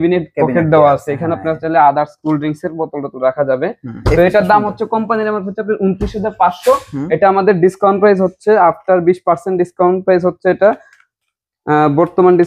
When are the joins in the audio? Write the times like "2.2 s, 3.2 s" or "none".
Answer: none